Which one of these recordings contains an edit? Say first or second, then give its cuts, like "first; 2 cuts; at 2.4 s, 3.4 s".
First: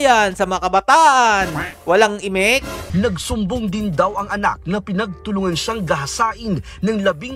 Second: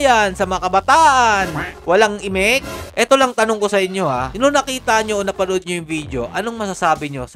second; 1 cut; at 2.8 s